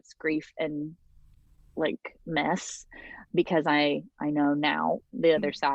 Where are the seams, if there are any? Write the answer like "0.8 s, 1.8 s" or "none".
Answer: none